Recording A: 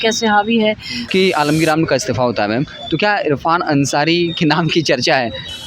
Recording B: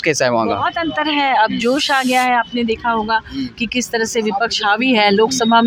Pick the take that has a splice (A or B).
A